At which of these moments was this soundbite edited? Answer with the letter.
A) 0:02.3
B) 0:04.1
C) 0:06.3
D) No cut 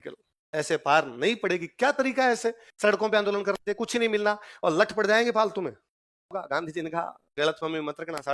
C